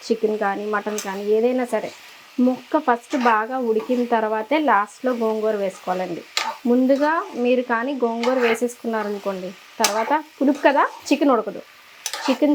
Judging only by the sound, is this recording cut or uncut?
uncut